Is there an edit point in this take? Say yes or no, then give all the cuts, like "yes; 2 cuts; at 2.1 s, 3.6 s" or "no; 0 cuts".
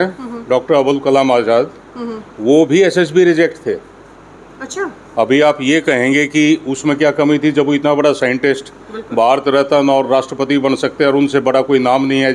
no; 0 cuts